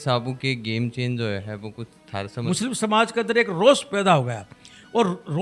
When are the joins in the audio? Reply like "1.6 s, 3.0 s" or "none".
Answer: 2.4 s